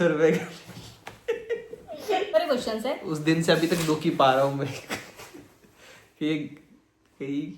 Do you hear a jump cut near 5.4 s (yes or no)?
no